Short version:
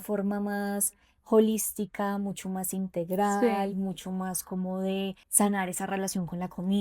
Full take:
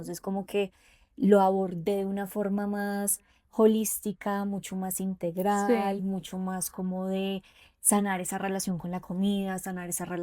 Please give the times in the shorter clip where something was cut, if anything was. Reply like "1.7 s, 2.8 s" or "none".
5.2 s